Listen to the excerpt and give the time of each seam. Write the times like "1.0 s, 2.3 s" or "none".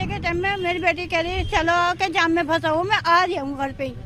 none